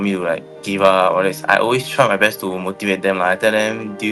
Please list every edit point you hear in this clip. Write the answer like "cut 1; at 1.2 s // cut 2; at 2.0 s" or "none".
none

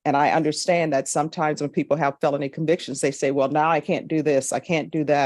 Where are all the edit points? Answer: none

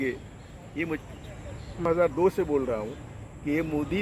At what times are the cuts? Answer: cut 1; at 1.9 s

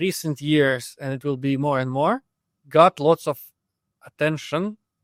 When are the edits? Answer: none

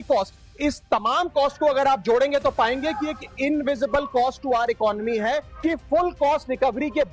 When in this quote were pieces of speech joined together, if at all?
cut 1; at 5.5 s

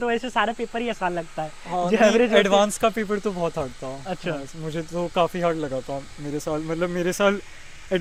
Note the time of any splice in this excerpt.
none

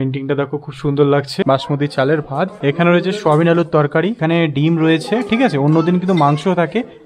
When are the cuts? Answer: cut 1; at 1.4 s // cut 2; at 2.5 s // cut 3; at 4.2 s

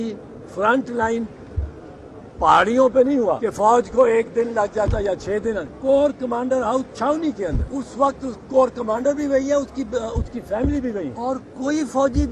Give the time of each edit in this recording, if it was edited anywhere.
cut 1; at 3.3 s // cut 2; at 5.7 s // cut 3; at 7.7 s // cut 4; at 11.1 s

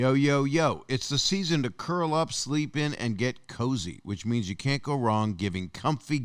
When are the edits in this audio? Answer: none

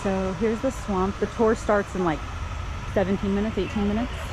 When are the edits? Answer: none

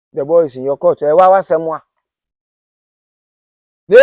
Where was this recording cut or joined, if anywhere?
none

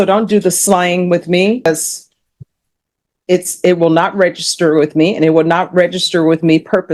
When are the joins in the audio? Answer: cut 1; at 1.7 s

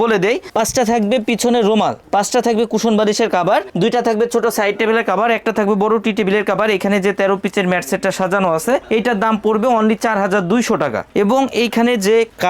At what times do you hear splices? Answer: none

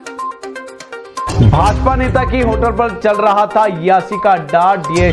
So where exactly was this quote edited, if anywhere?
none

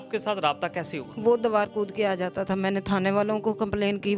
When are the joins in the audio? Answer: none

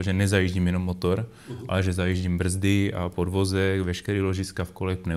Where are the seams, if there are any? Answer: none

